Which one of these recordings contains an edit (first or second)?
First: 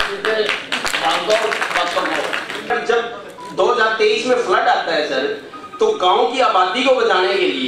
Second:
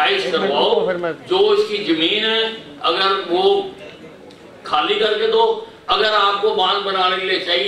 first